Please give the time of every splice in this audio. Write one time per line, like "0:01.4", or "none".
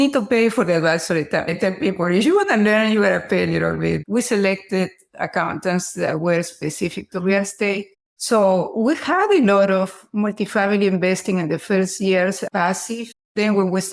0:01.5
0:04.0